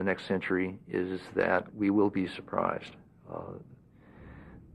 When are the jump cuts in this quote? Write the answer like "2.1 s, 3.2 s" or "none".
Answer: 1.2 s